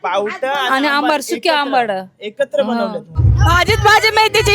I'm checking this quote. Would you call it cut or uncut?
cut